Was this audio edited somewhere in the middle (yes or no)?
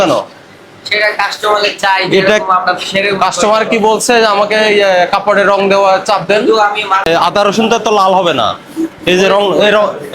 yes